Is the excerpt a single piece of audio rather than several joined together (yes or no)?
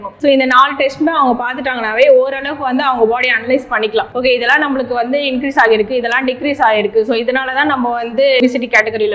yes